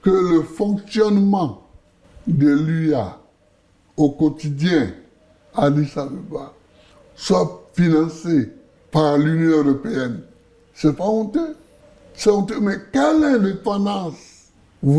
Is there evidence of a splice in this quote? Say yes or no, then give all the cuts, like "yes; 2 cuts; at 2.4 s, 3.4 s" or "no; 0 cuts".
no; 0 cuts